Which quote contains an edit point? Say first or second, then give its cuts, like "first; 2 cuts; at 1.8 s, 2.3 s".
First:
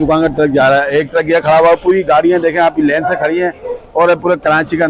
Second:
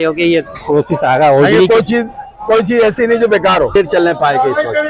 second; 1 cut; at 3.8 s